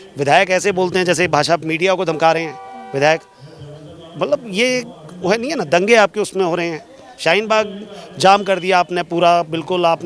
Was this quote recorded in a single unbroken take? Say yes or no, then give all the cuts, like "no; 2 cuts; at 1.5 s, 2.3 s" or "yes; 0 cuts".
yes; 0 cuts